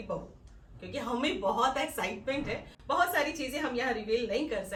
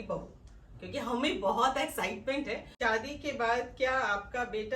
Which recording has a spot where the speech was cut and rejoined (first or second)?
second